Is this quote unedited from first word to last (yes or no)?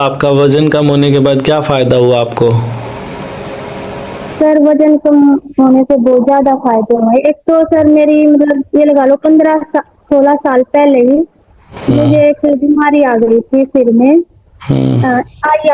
yes